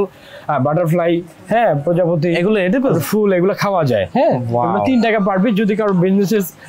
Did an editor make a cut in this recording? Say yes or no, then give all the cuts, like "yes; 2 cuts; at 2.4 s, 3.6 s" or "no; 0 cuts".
no; 0 cuts